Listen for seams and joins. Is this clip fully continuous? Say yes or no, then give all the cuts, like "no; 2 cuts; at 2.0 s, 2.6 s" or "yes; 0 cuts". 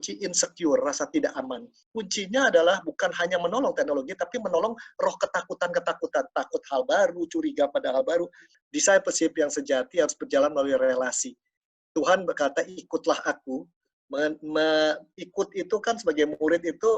no; 2 cuts; at 1.8 s, 8.5 s